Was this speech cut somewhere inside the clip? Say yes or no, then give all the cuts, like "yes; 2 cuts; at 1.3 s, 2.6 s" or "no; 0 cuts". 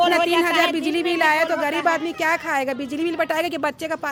no; 0 cuts